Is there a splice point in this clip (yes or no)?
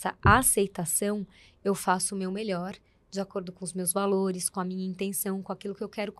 no